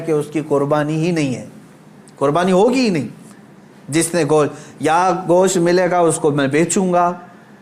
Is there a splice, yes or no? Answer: no